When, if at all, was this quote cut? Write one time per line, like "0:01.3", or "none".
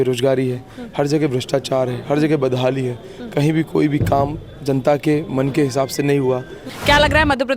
0:06.6